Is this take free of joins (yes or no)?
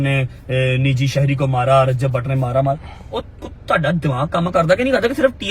yes